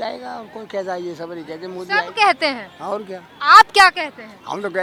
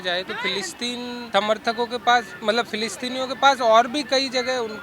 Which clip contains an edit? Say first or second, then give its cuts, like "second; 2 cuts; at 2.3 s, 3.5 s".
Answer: second; 1 cut; at 1.2 s